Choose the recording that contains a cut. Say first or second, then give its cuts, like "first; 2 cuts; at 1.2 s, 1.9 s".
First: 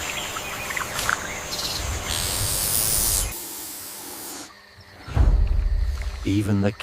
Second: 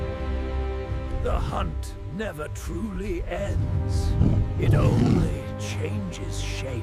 first; 1 cut; at 3.4 s